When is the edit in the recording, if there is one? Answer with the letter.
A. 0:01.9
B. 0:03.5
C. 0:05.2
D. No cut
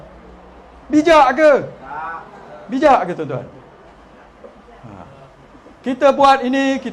D